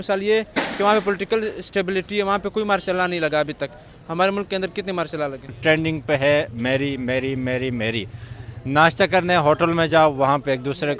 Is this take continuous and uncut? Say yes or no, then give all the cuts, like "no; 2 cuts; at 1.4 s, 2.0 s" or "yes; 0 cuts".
no; 1 cut; at 5.6 s